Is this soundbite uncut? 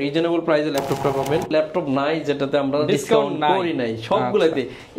no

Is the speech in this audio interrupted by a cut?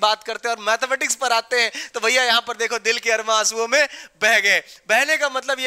no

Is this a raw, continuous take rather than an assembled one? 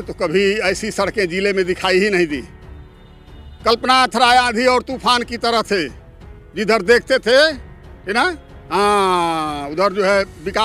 yes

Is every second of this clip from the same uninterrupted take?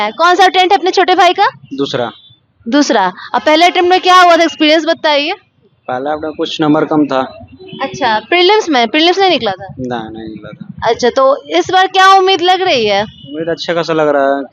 yes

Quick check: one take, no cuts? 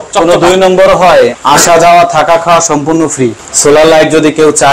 no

